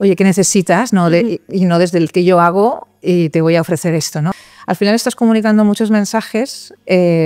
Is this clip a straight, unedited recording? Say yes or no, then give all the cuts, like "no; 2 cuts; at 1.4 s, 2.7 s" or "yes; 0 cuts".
no; 1 cut; at 4.3 s